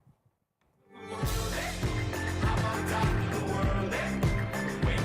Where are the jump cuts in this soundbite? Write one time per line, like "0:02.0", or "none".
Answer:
0:03.9

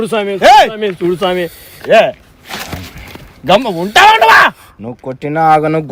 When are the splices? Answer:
none

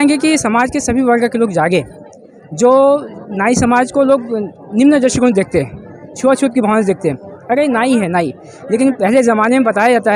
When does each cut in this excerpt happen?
none

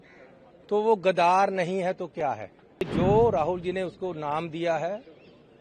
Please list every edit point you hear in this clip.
0:02.9

